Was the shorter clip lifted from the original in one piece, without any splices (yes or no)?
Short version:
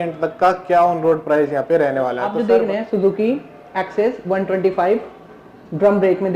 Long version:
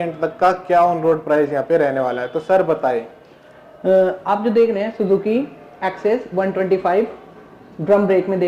no